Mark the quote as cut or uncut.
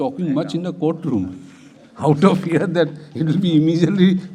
uncut